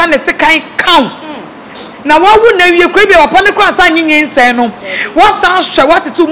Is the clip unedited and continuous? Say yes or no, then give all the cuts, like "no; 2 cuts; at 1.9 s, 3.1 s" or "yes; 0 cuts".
yes; 0 cuts